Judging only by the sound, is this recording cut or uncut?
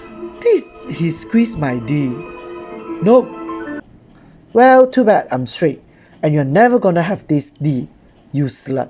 cut